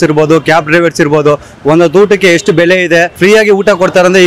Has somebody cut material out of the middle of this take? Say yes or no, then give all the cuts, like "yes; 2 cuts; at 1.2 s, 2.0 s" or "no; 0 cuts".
yes; 1 cut; at 3.1 s